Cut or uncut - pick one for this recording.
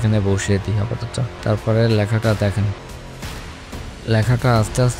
cut